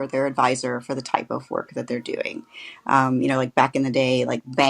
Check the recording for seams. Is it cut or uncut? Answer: uncut